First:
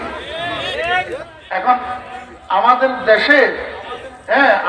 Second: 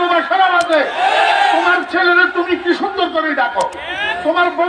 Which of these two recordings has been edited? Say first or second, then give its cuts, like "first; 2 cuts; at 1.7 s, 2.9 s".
first; 1 cut; at 1.1 s